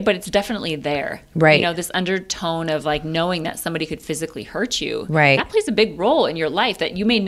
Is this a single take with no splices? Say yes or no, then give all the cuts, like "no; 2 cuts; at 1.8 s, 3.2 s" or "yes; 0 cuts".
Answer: yes; 0 cuts